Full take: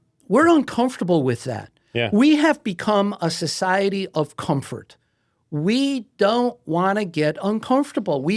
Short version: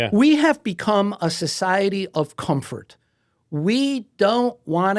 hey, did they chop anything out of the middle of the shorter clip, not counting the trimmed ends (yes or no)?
no